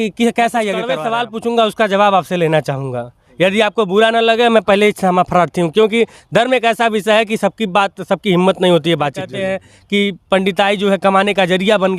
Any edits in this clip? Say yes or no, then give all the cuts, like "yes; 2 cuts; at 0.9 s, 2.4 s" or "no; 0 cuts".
yes; 2 cuts; at 1.0 s, 9.4 s